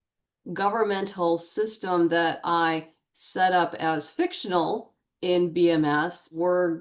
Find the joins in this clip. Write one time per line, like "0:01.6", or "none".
none

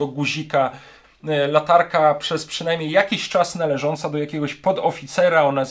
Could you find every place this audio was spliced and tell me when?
0:01.0

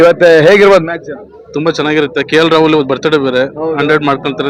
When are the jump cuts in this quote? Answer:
none

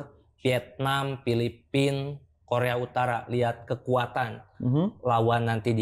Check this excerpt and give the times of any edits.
none

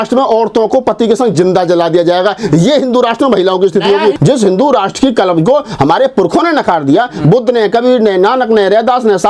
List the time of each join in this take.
0:04.2

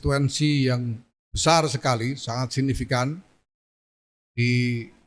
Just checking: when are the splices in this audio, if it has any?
none

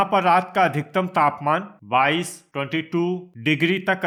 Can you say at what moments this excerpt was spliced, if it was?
none

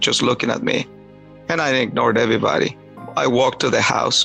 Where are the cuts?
0:03.1

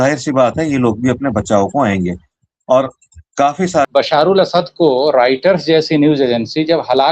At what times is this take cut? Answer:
0:03.9

